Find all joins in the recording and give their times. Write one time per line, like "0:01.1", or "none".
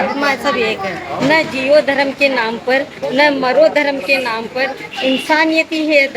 0:01.1